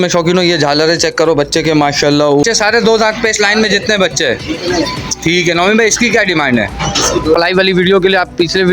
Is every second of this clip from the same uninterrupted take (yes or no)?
no